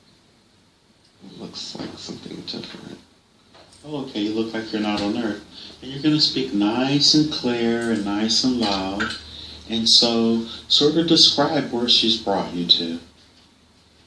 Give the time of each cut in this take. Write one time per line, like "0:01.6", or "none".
0:10.3